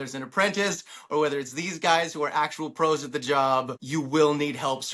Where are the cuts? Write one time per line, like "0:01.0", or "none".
0:03.8